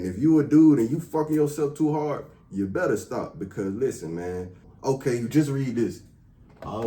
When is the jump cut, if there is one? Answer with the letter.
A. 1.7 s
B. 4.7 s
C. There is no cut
B